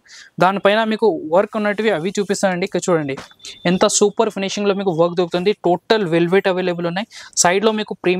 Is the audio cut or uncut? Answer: uncut